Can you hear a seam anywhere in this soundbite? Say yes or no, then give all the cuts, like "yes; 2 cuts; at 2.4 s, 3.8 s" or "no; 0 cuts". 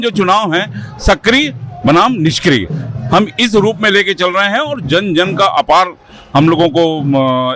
no; 0 cuts